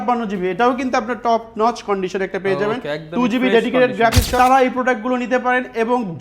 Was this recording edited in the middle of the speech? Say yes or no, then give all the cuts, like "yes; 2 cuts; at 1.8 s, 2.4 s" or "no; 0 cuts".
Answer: yes; 1 cut; at 4.3 s